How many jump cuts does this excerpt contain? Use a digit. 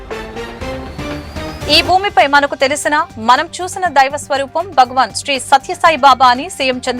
1